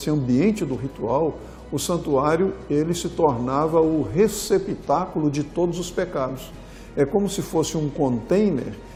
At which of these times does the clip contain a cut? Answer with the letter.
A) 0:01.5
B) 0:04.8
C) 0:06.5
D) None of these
D